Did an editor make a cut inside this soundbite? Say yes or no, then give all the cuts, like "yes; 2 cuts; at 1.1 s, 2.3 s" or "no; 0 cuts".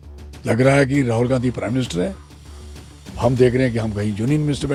no; 0 cuts